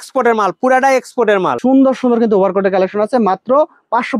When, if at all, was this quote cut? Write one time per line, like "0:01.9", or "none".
0:01.5